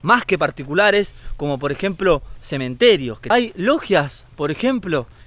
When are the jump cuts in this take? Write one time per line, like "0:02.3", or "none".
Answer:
0:03.3